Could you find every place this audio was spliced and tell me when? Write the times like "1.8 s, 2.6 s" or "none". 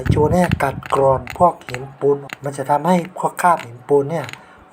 2.4 s